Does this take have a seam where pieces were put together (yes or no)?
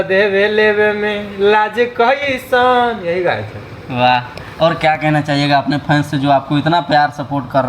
no